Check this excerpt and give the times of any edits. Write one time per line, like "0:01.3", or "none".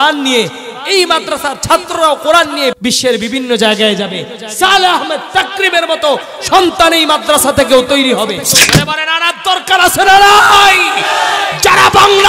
0:02.8
0:08.7